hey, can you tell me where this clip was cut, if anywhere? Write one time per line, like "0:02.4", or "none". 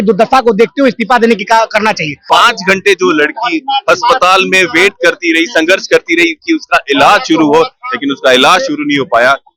0:02.2